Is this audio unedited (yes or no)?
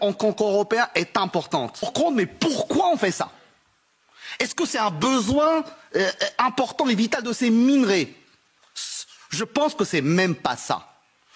no